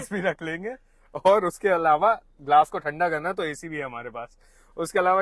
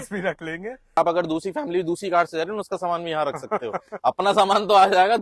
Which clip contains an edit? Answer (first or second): second